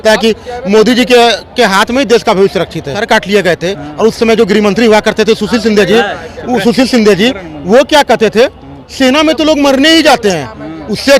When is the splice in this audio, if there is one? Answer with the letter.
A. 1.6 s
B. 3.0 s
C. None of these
B